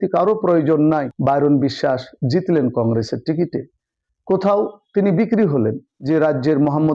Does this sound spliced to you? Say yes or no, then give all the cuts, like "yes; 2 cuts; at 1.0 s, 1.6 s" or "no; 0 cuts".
yes; 2 cuts; at 1.1 s, 5.9 s